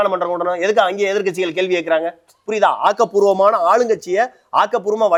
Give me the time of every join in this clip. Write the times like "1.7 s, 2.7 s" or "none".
none